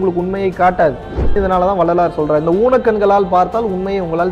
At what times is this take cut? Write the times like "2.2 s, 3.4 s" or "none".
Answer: 1.4 s

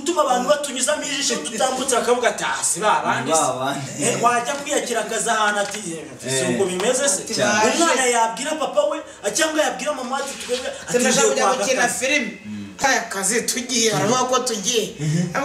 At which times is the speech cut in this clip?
12.8 s

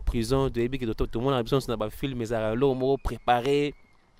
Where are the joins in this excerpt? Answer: none

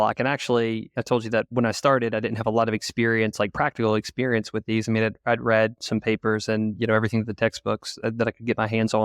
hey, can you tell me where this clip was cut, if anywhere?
0.9 s

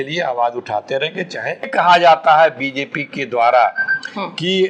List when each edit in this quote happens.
1.7 s

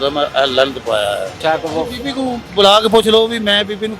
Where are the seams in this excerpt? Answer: 1.4 s

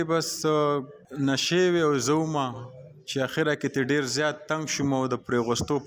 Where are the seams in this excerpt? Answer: 1.0 s

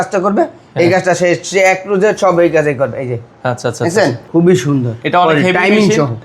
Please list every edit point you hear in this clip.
4.2 s

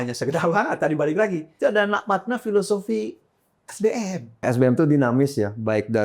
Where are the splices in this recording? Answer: 1.5 s, 4.4 s

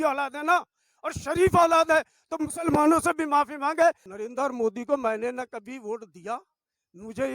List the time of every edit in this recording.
4.0 s

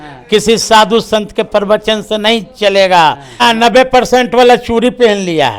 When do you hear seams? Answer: 3.4 s

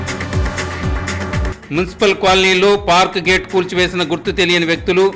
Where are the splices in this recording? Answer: none

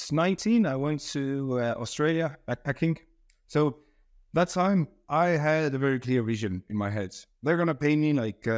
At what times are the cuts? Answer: none

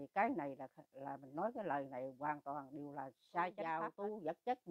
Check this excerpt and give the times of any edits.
3.7 s

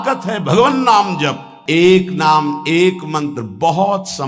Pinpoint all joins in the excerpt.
1.5 s

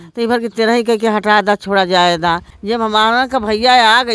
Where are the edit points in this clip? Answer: 2.5 s

